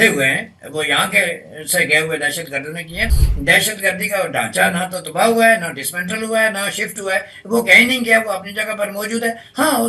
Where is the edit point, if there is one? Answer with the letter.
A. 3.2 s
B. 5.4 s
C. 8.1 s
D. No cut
A